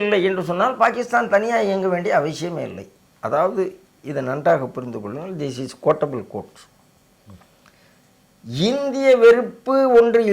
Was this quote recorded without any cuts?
yes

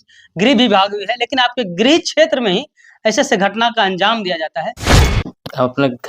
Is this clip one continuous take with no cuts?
no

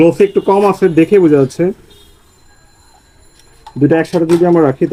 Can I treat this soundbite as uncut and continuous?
yes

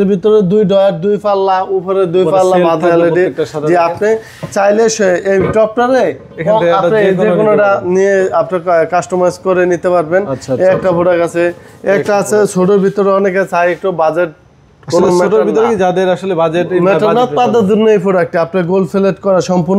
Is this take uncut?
yes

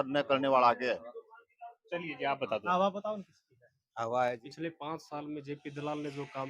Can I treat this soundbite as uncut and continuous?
no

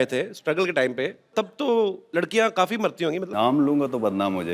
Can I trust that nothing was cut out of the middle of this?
no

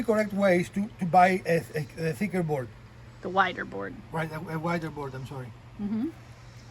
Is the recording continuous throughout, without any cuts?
yes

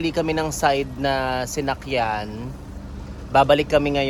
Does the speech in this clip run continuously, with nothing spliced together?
yes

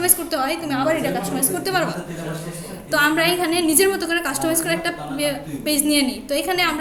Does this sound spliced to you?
no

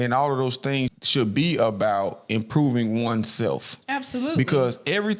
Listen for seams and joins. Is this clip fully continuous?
no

